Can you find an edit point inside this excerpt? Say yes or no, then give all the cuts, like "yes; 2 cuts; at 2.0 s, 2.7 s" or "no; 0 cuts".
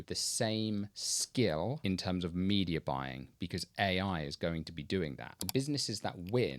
yes; 1 cut; at 5.4 s